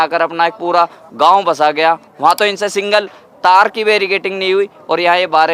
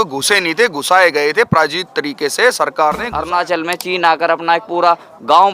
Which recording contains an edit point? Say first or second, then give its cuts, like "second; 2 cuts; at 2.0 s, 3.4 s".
second; 1 cut; at 3.1 s